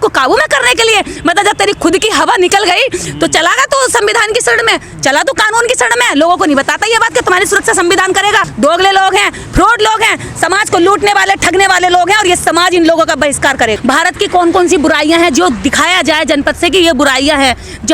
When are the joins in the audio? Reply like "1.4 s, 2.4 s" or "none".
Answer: 8.5 s, 13.7 s